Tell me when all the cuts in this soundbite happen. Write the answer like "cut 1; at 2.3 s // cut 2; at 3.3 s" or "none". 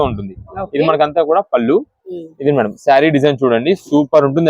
none